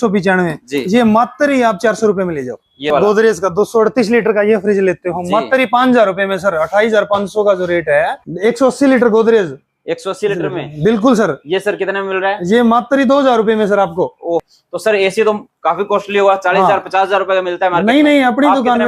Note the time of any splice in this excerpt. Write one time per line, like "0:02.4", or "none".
0:02.9
0:08.2
0:14.4

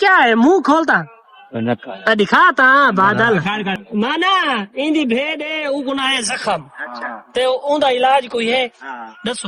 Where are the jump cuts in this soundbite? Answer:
0:03.8

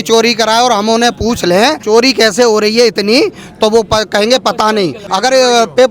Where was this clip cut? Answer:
0:01.8
0:05.0

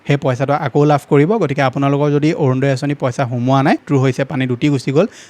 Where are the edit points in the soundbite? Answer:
0:03.8

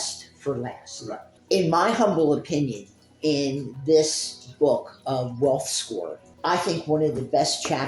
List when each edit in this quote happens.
0:01.3
0:06.2

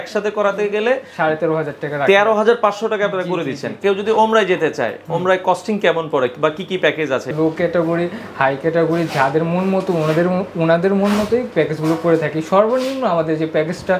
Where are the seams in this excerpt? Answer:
0:03.8
0:07.3

